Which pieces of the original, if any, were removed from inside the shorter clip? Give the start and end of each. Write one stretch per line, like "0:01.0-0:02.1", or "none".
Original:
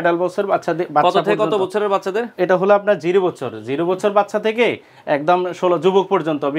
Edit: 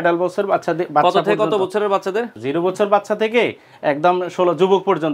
0:02.3-0:03.5